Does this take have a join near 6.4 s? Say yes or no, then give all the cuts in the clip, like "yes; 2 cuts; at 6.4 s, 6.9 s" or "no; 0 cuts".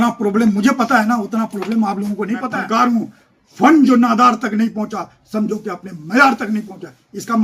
no; 1 cut; at 2.5 s